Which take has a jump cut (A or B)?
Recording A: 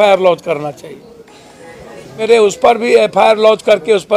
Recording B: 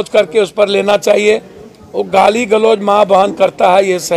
A